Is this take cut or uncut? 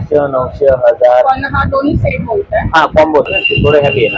cut